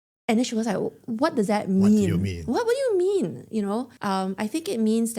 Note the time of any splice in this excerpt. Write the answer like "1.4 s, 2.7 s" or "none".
3.9 s